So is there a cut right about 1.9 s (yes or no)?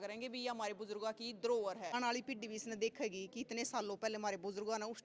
yes